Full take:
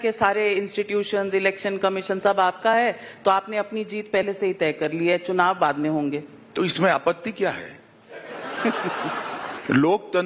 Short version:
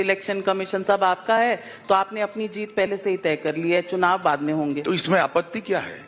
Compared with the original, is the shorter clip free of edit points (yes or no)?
no